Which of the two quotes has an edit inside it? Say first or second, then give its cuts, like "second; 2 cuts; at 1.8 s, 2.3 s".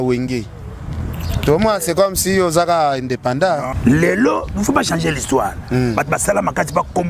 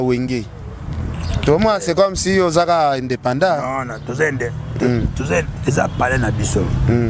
first; 1 cut; at 3.7 s